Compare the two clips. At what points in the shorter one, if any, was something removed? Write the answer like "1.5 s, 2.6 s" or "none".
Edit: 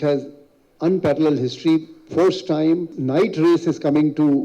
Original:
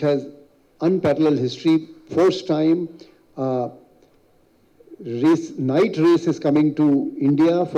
2.9 s